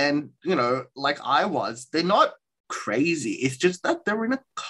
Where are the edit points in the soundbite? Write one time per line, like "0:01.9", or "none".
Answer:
0:02.8

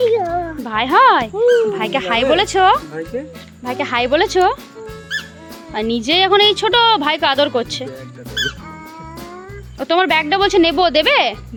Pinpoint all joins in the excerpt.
none

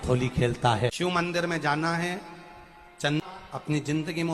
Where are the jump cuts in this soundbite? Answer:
0:00.9
0:03.2

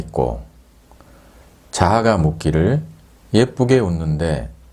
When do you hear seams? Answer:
none

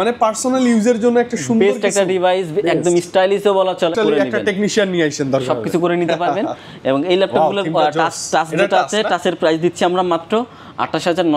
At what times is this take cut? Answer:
0:03.9

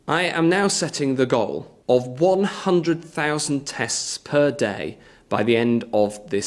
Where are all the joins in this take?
0:01.7

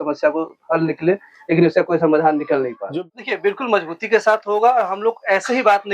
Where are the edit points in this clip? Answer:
0:02.8

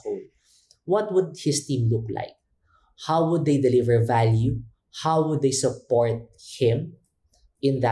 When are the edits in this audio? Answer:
none

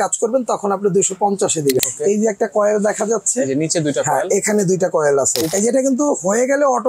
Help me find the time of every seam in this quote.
0:01.8
0:05.5

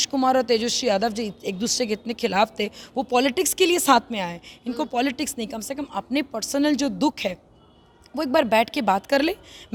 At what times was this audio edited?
none

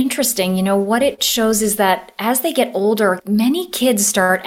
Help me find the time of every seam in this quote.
0:03.2

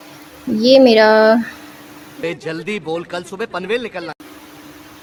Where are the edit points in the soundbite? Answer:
none

